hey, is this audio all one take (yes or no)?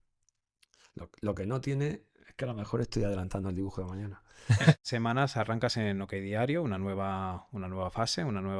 no